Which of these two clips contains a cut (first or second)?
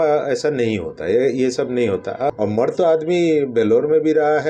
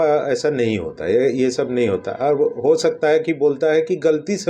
first